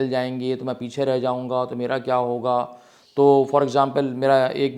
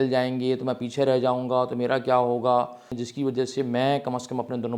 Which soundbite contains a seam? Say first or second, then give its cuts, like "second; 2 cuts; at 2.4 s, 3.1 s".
second; 1 cut; at 3.0 s